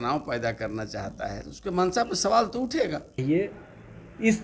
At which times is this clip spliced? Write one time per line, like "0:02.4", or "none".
0:03.2